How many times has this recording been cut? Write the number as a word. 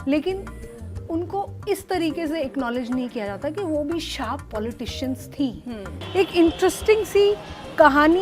one